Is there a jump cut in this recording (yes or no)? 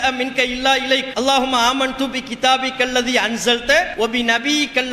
yes